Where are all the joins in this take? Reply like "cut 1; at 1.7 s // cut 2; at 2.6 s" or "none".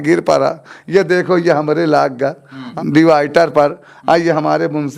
cut 1; at 2.6 s